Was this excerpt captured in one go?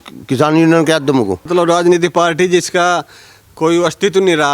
no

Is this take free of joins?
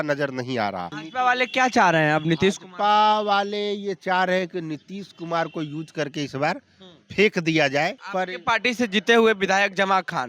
no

